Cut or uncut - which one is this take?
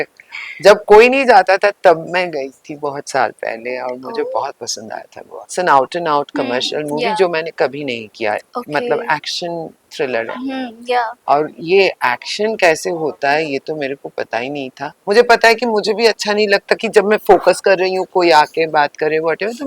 cut